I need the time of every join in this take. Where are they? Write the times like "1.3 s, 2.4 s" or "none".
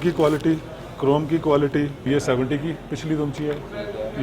2.1 s